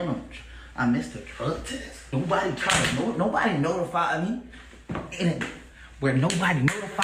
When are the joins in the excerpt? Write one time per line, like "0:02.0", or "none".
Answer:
0:02.1